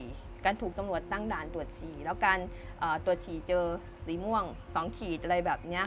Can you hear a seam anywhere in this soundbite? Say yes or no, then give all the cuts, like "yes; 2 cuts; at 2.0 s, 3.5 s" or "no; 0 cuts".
no; 0 cuts